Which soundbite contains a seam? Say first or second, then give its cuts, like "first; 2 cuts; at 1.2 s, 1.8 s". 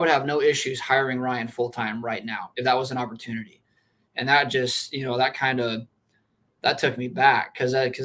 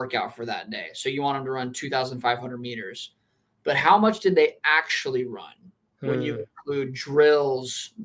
first; 1 cut; at 2.4 s